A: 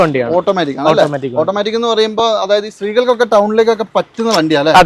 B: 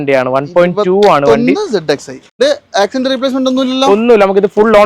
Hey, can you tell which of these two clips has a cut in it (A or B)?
B